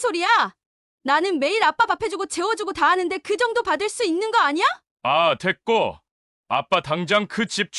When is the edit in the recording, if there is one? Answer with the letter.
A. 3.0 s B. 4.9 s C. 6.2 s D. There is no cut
B